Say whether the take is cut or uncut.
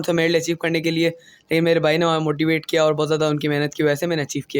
uncut